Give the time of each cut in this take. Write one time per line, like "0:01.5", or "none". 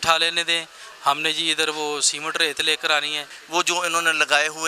0:03.3